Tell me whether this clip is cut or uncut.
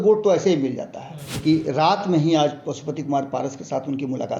cut